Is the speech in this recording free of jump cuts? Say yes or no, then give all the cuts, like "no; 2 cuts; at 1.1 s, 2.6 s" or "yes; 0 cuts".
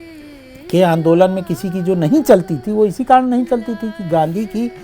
yes; 0 cuts